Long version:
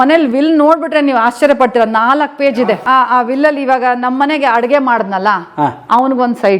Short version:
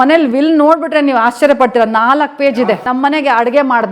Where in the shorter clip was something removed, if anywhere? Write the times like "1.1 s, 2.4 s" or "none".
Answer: 2.8 s